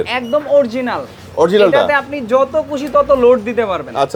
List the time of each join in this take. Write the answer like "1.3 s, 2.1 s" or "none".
none